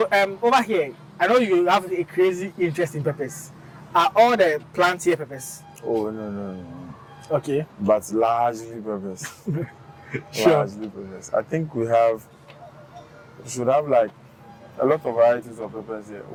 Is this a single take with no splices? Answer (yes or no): yes